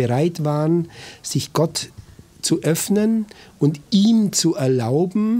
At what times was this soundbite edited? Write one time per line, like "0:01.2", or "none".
none